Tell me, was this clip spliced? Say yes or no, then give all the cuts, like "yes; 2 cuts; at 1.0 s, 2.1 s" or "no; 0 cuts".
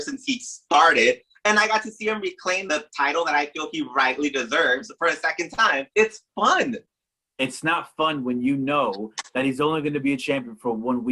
yes; 2 cuts; at 2.6 s, 5.9 s